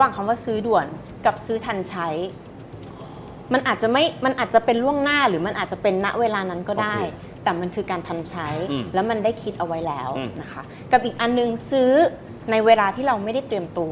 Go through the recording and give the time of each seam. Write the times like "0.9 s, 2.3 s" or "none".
none